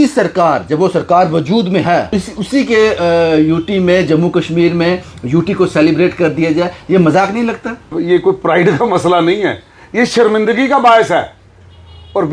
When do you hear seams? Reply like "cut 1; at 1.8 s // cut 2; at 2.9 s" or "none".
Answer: cut 1; at 2.1 s // cut 2; at 7.9 s